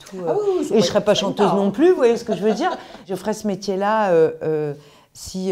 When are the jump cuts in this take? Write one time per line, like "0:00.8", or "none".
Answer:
0:03.1